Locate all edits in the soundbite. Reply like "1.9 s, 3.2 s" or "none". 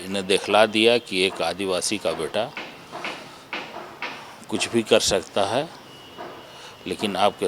none